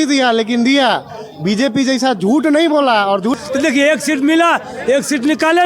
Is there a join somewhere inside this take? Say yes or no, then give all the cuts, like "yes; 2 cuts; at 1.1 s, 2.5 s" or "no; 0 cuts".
yes; 1 cut; at 3.4 s